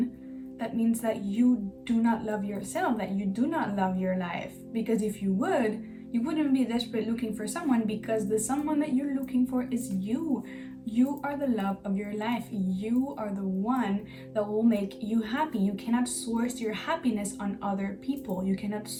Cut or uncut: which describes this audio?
uncut